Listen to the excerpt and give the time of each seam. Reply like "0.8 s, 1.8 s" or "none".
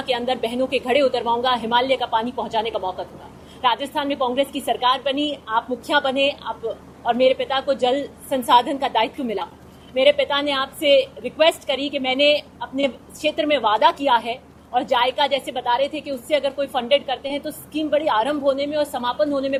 none